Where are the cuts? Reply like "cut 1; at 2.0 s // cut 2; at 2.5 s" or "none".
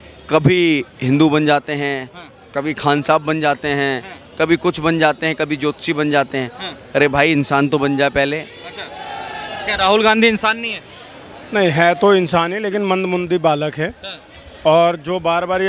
none